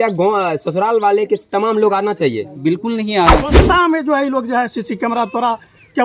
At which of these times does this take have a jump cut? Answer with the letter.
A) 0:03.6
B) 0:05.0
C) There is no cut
A